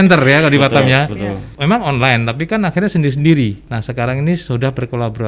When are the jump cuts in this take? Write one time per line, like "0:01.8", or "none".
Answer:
0:01.5
0:03.6